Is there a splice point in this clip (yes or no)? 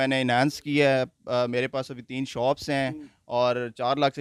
no